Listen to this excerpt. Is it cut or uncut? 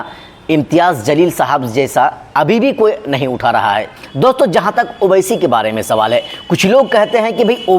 cut